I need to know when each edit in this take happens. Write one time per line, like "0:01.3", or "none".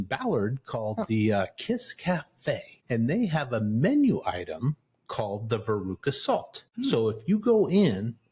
0:02.8
0:06.6